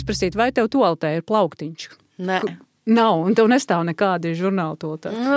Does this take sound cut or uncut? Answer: uncut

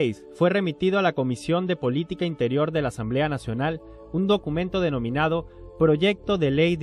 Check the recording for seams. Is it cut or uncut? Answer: cut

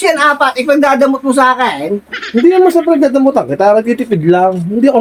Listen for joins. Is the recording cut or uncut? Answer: uncut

